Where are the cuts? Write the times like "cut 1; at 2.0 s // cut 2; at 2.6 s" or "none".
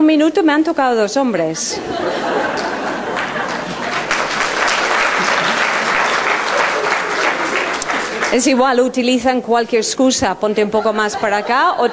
cut 1; at 5.9 s